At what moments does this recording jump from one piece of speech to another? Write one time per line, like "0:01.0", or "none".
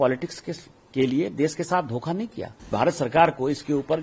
0:02.7